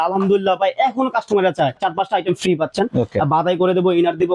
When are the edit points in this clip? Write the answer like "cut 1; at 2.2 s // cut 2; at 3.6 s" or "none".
cut 1; at 1.8 s